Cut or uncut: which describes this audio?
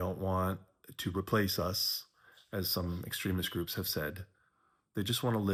uncut